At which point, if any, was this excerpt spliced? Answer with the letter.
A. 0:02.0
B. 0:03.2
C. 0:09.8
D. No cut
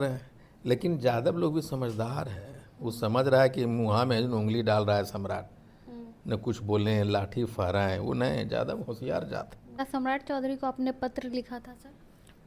C